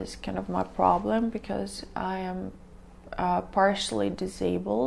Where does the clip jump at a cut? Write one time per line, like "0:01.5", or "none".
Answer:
none